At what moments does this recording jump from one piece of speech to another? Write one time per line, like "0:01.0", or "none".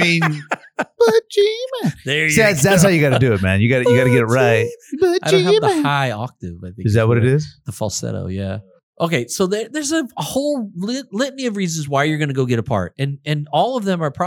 0:08.5